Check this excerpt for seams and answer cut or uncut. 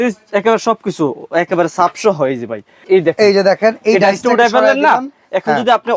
cut